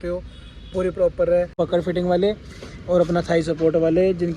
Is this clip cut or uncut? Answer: cut